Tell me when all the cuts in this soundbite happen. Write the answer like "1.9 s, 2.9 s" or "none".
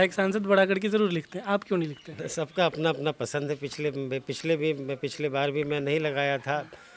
none